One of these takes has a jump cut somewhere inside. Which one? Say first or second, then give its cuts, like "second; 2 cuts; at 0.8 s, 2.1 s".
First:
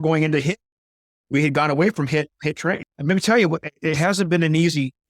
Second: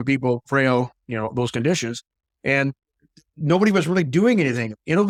first; 1 cut; at 2.8 s